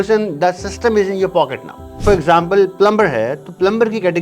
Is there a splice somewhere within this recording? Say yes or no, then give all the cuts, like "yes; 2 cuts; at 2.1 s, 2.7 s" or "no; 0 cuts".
yes; 1 cut; at 2.0 s